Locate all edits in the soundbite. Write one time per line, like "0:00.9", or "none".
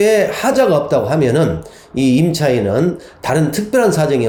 none

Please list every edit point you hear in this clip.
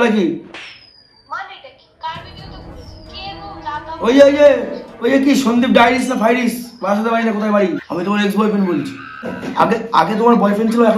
0:07.8
0:09.4

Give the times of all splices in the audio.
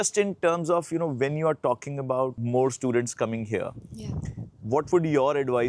none

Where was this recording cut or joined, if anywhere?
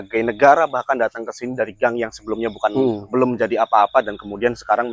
none

